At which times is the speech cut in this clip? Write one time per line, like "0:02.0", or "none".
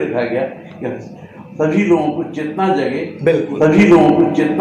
0:03.6

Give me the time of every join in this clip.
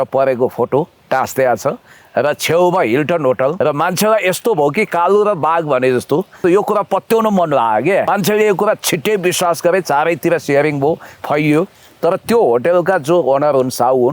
0:03.6
0:06.4
0:08.1

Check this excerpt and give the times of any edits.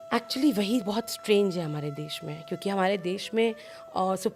none

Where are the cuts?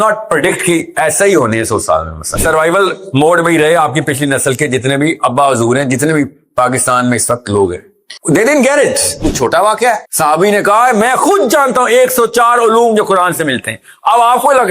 0:02.4
0:09.1

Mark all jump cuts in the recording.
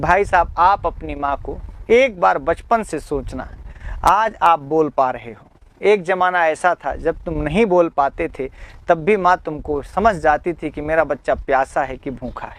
none

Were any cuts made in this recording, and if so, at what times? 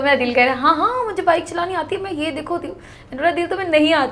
none

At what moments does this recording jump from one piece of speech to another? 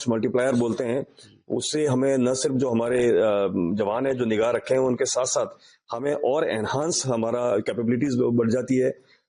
none

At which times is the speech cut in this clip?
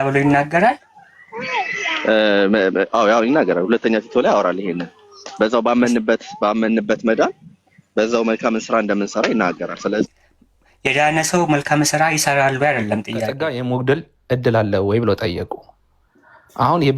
0:13.4

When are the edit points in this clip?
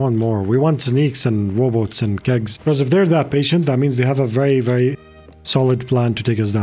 0:02.5

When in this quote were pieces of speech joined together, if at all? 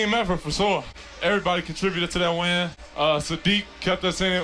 0:01.0
0:02.8

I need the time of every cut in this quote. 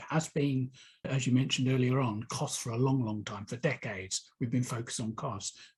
none

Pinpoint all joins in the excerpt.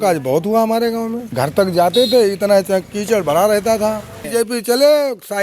0:01.2
0:04.2

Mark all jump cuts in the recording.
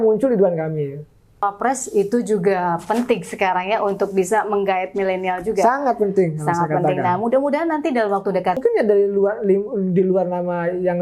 0:01.4
0:08.6

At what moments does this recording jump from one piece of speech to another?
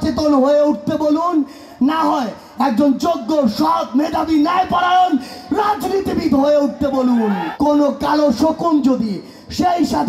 0:07.5

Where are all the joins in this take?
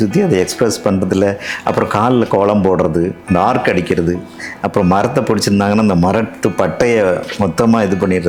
none

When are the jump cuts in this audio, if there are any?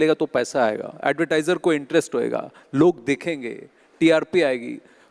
0:00.9

